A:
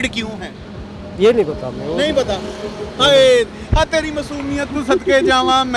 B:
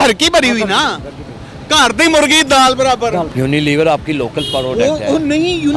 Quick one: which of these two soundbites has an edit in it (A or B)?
B